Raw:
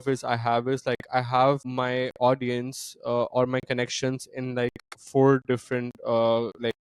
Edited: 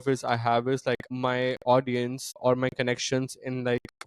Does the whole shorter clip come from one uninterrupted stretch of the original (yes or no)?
no